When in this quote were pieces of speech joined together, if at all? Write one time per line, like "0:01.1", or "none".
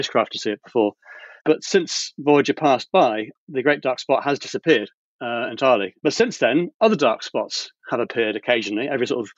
0:01.4
0:03.3
0:05.9